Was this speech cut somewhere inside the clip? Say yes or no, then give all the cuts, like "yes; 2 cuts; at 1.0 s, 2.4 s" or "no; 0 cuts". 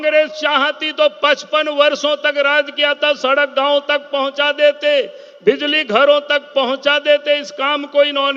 no; 0 cuts